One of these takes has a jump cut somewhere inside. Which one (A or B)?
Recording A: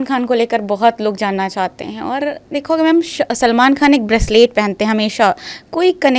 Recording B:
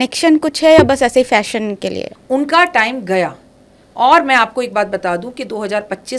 B